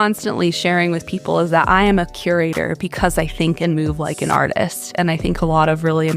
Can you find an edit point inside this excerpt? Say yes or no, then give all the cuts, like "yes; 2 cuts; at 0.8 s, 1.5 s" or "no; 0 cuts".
no; 0 cuts